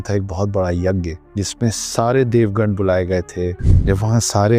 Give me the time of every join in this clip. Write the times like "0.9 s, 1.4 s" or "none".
1.2 s, 3.7 s